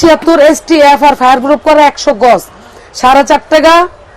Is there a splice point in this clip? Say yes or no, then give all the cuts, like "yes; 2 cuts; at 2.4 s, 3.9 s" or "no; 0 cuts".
no; 0 cuts